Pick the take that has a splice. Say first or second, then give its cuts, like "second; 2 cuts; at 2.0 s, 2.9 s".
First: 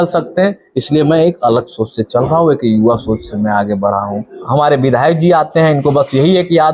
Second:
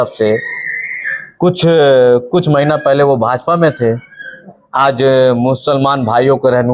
first; 1 cut; at 4.4 s